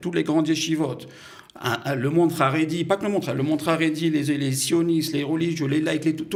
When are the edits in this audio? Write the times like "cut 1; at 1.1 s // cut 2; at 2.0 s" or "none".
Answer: none

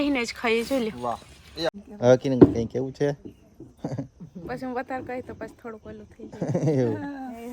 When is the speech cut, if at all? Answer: cut 1; at 1.7 s

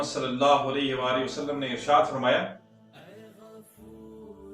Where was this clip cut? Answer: cut 1; at 2.9 s

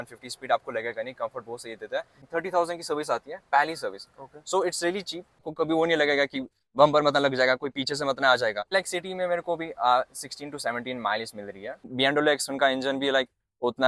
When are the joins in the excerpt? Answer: cut 1; at 2.2 s // cut 2; at 5.5 s // cut 3; at 8.7 s // cut 4; at 11.9 s

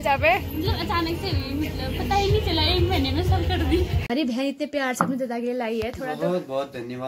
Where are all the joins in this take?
cut 1; at 4.0 s

